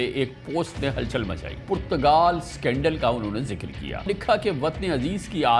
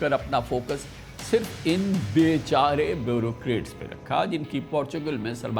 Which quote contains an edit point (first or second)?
first